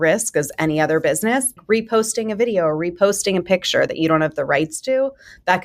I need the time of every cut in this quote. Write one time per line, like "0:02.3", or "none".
0:01.6